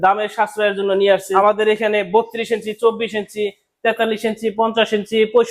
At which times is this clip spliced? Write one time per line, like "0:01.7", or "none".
0:01.3

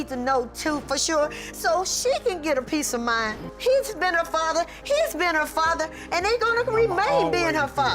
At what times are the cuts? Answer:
0:03.5

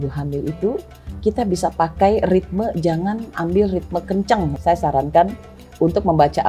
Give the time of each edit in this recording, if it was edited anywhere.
0:04.5

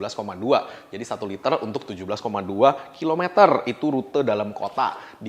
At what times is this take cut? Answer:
none

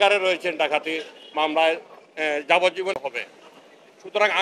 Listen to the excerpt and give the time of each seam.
0:03.0

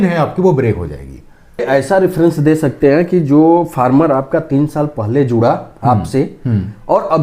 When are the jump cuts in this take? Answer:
0:01.6

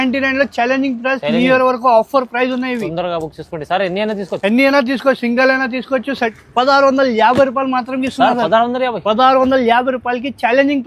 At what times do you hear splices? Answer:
0:06.3

